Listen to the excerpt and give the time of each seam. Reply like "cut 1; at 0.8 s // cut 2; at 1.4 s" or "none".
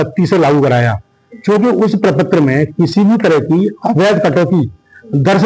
none